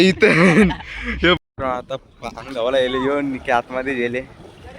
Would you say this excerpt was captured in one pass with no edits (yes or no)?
no